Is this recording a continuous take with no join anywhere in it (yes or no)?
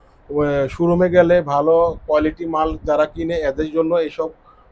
yes